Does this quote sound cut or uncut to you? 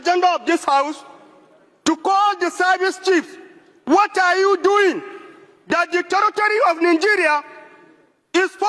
uncut